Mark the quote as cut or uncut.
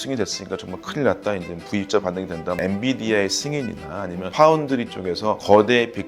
cut